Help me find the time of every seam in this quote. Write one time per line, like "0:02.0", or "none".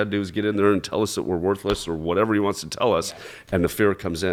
none